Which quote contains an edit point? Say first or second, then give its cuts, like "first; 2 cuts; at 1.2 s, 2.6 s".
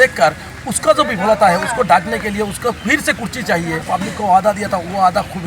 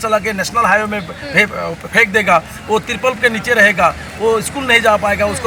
first; 1 cut; at 3.8 s